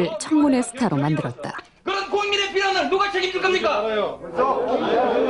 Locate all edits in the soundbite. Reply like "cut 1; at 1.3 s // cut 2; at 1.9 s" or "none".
cut 1; at 4.4 s